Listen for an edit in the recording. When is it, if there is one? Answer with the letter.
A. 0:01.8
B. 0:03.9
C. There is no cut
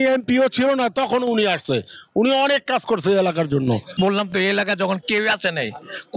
B